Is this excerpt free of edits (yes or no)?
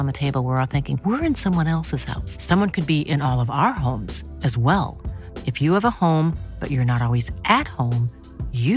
yes